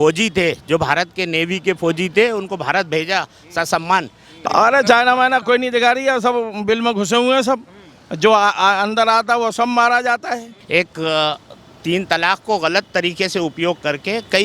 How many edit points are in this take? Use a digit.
2